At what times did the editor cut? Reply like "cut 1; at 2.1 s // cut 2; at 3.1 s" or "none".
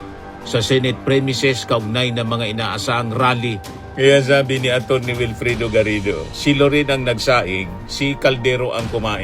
cut 1; at 3.8 s